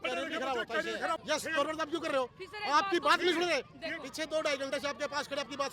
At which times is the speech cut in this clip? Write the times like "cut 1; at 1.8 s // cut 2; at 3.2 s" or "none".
cut 1; at 1.2 s